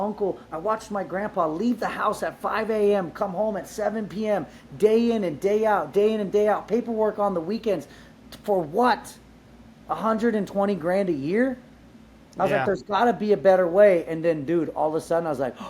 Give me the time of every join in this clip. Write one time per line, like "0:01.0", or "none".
none